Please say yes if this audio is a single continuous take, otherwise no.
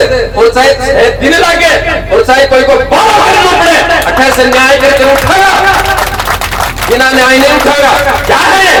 yes